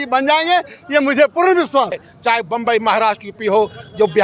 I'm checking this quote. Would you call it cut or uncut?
cut